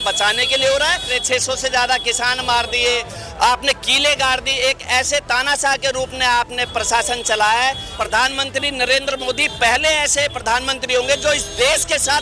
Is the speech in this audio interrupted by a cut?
yes; 2 cuts; at 1.2 s, 7.9 s

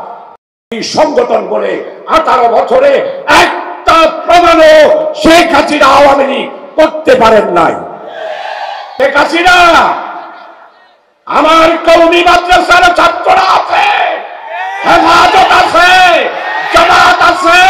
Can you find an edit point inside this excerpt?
yes; 1 cut; at 8.8 s

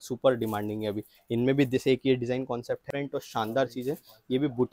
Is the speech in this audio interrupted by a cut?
yes; 1 cut; at 2.8 s

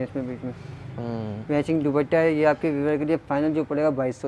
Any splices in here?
no; 0 cuts

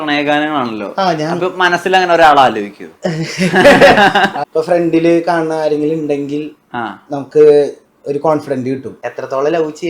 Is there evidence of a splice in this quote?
yes; 2 cuts; at 4.4 s, 9.0 s

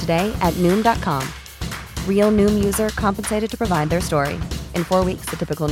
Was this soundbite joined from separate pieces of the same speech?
no; 0 cuts

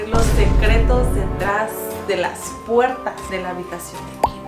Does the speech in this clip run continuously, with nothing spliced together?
yes; 0 cuts

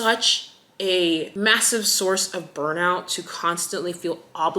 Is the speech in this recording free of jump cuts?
no; 1 cut; at 1.3 s

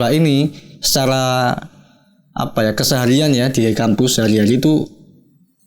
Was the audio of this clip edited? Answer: no; 0 cuts

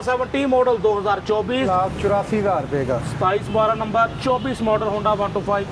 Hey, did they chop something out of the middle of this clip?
yes; 1 cut; at 1.7 s

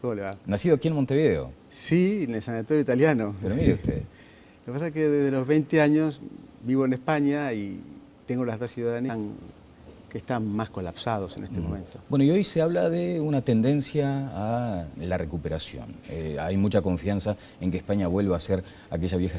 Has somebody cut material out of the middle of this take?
no; 0 cuts

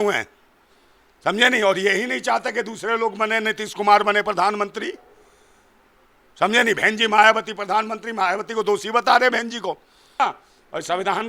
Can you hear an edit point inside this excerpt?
yes; 1 cut; at 10.2 s

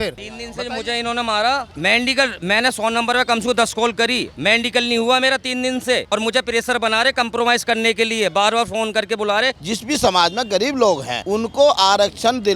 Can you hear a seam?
yes; 1 cut; at 9.6 s

